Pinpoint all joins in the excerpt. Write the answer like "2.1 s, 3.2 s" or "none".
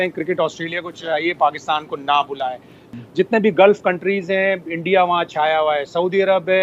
2.9 s